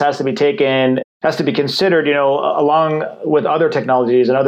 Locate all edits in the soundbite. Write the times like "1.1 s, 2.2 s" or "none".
1.1 s